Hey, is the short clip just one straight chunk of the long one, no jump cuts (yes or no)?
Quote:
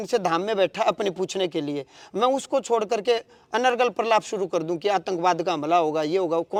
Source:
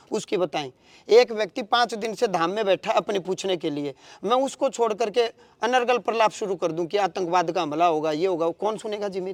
yes